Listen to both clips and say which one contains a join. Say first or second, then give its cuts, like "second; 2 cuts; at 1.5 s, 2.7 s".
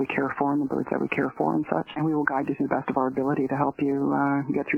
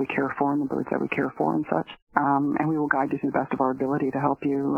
first; 1 cut; at 2.0 s